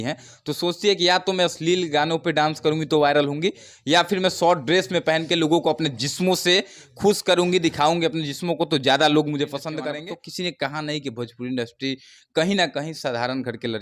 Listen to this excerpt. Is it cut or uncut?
cut